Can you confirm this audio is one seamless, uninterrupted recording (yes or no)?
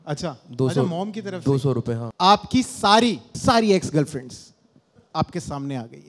no